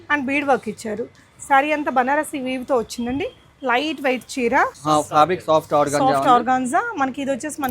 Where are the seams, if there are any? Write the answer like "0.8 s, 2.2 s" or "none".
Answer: 4.8 s